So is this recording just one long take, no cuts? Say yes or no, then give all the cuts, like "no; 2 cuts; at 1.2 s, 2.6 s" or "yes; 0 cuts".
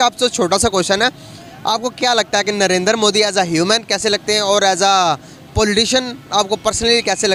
yes; 0 cuts